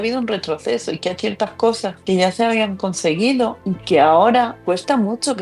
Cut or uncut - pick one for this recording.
uncut